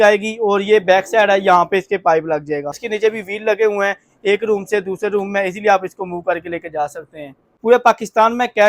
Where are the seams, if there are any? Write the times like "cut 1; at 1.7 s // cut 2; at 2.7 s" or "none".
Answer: cut 1; at 2.9 s // cut 2; at 7.5 s